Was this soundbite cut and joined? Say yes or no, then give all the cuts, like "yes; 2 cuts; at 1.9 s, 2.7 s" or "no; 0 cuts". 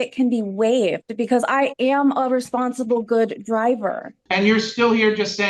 yes; 1 cut; at 4.1 s